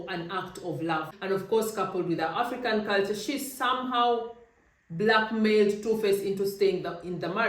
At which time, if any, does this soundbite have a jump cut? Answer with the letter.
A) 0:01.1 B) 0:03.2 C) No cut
A